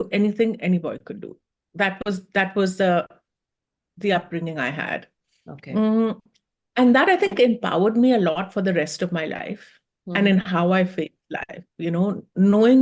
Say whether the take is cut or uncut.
uncut